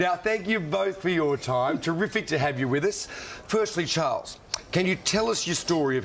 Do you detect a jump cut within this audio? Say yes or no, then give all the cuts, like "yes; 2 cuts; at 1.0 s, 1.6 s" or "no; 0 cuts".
no; 0 cuts